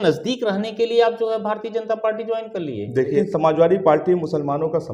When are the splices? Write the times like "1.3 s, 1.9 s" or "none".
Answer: 3.2 s

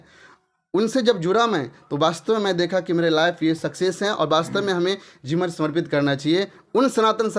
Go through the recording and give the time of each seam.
none

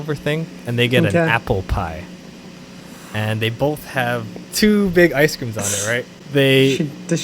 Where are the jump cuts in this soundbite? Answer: 4.4 s, 6.1 s

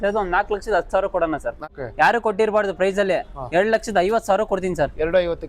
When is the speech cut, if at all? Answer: 2.1 s

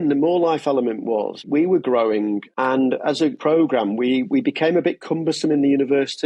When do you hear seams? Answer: 1.5 s, 2.5 s, 3.4 s

